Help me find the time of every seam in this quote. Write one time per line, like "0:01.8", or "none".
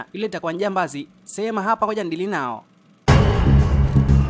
0:02.9